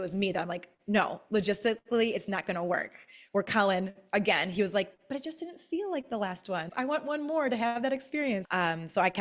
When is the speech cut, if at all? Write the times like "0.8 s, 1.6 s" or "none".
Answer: 6.7 s, 8.4 s